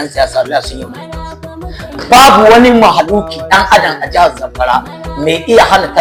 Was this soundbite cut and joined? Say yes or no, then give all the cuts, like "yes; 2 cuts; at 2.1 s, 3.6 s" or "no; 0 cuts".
no; 0 cuts